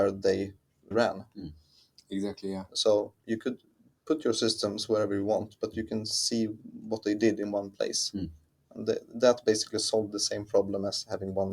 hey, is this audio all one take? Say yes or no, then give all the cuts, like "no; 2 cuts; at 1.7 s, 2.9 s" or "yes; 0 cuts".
no; 1 cut; at 0.9 s